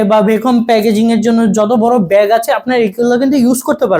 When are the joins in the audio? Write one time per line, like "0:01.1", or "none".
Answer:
none